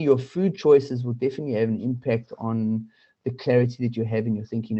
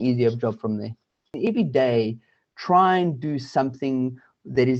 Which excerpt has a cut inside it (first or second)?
second